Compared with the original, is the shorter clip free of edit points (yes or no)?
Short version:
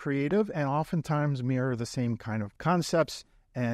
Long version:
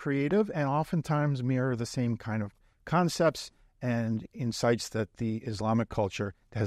no